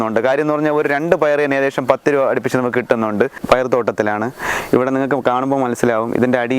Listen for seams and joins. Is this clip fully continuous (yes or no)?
no